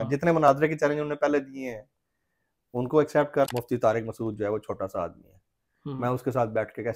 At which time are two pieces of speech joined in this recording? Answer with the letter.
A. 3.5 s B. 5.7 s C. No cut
A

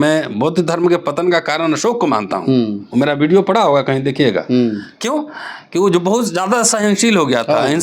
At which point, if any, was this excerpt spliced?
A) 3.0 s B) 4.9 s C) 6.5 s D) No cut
D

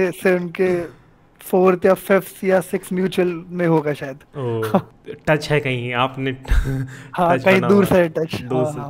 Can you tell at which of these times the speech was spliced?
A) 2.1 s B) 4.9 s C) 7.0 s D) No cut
B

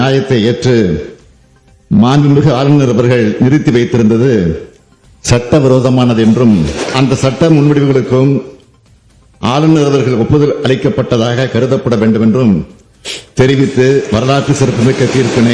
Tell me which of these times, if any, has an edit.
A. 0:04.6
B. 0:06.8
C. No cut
B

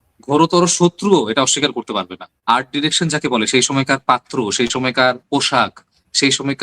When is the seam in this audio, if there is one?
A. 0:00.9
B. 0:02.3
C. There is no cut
B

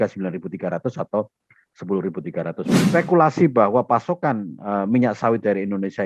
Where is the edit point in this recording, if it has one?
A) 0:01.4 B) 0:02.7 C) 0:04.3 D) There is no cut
B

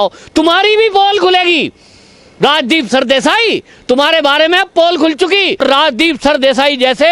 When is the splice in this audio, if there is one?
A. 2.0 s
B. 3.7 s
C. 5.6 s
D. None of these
C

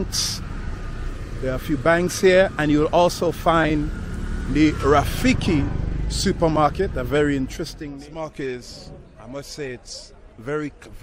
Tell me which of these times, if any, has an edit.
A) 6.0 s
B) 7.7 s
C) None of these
B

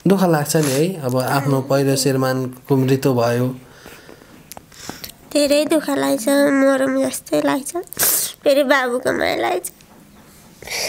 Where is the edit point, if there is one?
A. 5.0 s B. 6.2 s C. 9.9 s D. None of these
D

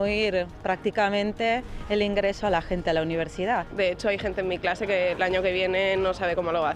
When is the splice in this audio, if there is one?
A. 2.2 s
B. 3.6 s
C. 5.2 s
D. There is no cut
B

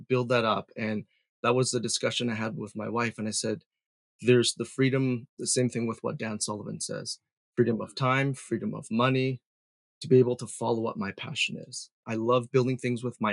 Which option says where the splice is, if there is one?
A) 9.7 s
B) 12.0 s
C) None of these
B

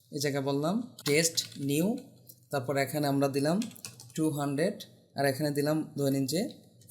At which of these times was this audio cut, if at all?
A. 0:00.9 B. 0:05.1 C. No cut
A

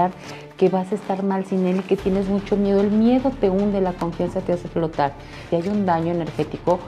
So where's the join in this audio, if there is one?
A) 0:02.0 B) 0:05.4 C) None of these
B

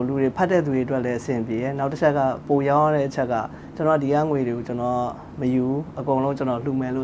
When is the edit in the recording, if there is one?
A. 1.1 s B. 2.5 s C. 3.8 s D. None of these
D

